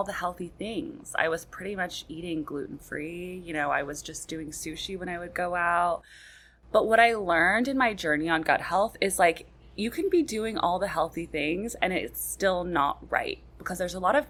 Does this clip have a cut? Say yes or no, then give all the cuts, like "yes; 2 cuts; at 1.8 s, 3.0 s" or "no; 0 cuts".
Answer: no; 0 cuts